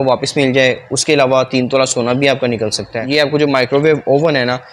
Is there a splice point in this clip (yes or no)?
yes